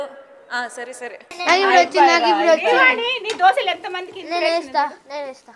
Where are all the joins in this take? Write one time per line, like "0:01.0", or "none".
0:01.4